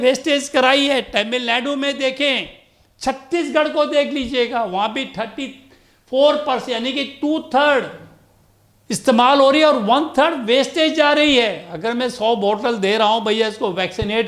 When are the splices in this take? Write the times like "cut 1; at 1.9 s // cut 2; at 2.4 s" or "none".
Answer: none